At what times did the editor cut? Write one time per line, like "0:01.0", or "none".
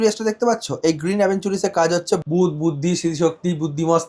0:02.2